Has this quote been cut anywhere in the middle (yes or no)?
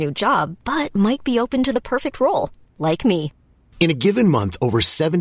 no